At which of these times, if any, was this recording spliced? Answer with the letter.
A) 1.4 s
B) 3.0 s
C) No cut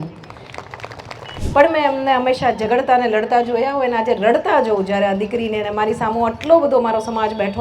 A